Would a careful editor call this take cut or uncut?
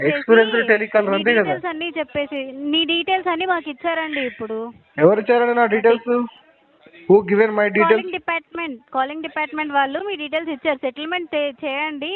uncut